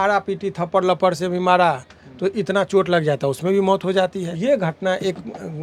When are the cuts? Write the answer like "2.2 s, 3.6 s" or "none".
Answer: 4.3 s